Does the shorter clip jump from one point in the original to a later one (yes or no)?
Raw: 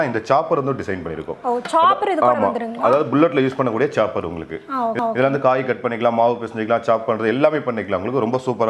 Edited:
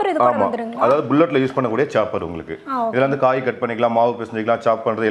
yes